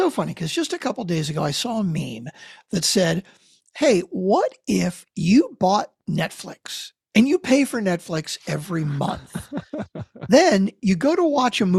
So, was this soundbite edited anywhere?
no; 0 cuts

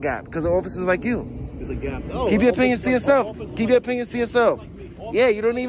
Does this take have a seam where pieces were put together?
no; 0 cuts

